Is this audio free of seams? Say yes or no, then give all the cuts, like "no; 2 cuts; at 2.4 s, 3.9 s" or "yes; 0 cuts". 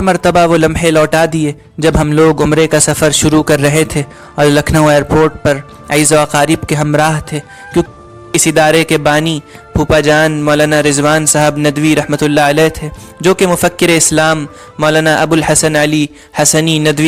no; 1 cut; at 7.9 s